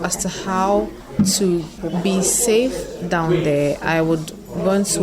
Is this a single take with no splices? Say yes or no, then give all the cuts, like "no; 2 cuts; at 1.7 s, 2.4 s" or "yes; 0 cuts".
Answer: no; 2 cuts; at 1.0 s, 1.8 s